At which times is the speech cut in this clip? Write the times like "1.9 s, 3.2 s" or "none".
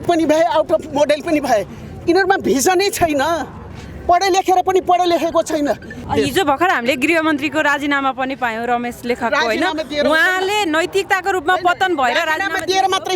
5.9 s